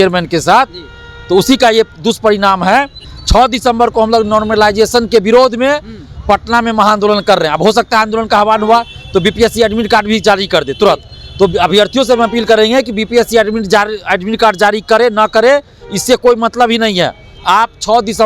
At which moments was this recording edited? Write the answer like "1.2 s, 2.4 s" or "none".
3.1 s